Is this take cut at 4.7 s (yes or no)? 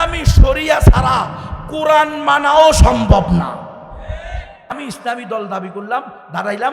yes